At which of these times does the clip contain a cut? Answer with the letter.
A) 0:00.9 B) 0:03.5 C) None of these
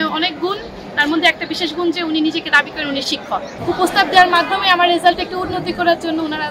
B